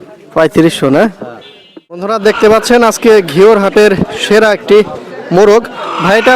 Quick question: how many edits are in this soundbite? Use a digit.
1